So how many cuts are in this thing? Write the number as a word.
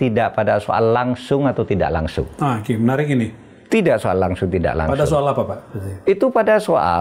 zero